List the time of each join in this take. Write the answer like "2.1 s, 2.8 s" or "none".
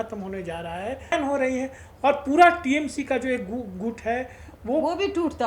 1.1 s